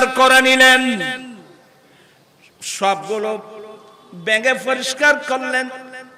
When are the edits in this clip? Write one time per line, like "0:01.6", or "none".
none

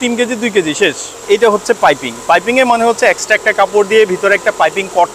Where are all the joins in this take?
0:01.2

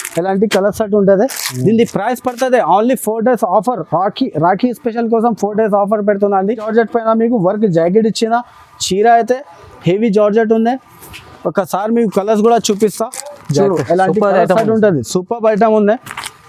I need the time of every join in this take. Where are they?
0:06.7

